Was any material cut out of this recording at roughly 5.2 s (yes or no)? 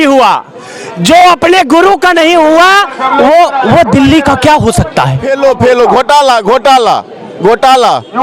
yes